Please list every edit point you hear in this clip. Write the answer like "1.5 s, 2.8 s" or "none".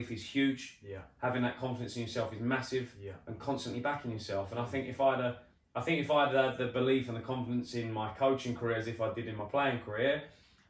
none